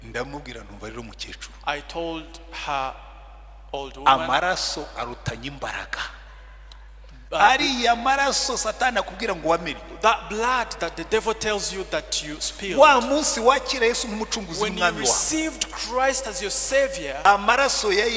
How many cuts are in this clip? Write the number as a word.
one